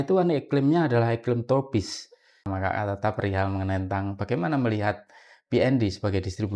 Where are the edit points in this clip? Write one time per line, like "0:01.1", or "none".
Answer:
0:02.4